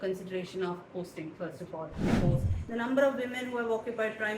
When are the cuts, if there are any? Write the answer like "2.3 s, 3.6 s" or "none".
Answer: 2.1 s